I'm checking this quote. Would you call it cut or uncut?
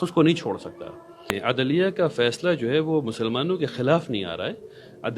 cut